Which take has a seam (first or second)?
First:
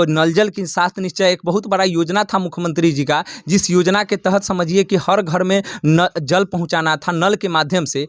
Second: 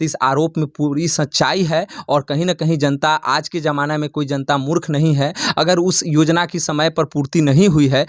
second